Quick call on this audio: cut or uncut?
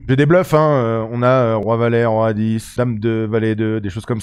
cut